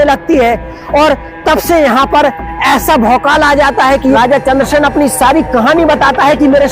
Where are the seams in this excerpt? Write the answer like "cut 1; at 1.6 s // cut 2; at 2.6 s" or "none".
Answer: cut 1; at 4.0 s